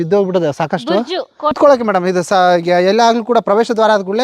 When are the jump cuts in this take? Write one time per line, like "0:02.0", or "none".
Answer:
0:01.6